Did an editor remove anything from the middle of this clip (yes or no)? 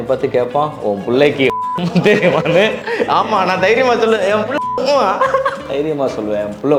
no